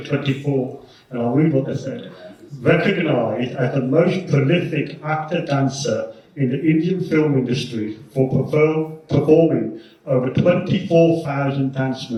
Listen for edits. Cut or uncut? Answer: uncut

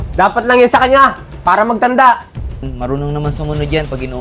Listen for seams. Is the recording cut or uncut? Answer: cut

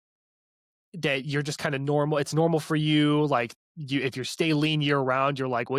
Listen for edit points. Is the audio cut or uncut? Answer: uncut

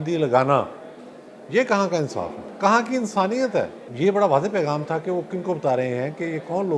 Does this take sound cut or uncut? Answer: cut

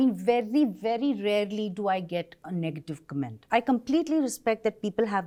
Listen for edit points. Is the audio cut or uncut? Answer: uncut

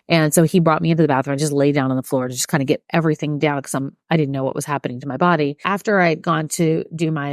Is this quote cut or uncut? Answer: cut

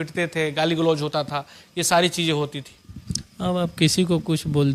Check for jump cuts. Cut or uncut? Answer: uncut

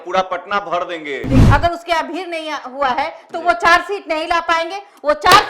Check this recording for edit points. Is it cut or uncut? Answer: cut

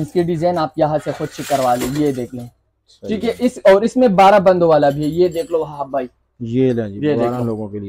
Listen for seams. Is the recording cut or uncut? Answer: uncut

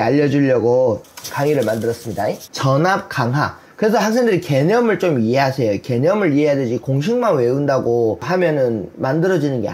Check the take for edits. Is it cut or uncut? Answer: cut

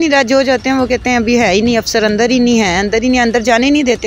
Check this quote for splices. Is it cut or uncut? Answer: uncut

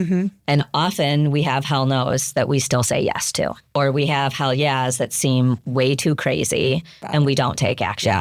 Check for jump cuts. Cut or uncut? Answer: cut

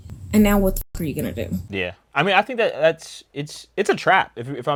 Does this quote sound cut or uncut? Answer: uncut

